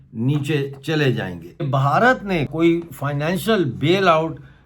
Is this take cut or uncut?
cut